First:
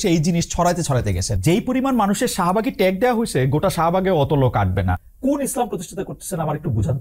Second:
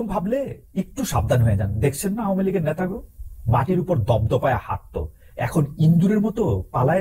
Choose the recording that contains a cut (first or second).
first